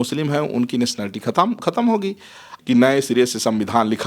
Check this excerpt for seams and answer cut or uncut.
cut